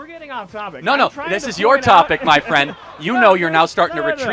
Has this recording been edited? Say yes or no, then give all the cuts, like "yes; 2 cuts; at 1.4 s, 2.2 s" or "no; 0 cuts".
no; 0 cuts